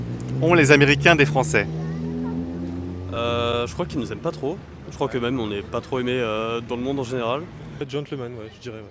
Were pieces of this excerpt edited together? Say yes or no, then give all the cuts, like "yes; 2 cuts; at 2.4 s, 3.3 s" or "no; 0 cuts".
no; 0 cuts